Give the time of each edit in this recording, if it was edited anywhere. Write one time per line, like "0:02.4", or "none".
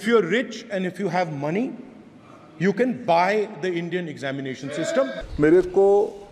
0:05.2